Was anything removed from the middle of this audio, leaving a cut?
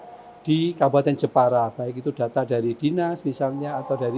no; 0 cuts

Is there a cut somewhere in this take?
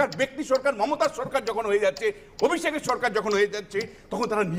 no; 0 cuts

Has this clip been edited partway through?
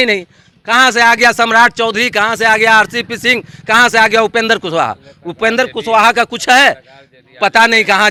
no; 0 cuts

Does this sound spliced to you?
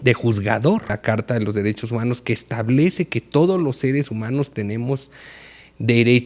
yes; 1 cut; at 1.0 s

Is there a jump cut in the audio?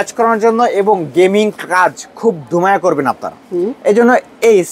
no; 0 cuts

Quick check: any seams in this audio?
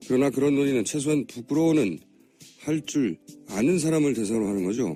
no; 0 cuts

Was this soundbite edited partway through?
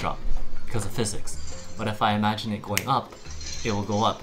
no; 0 cuts

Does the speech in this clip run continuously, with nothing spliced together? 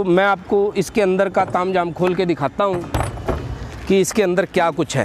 yes; 0 cuts

